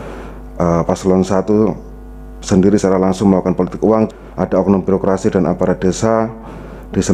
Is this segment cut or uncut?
cut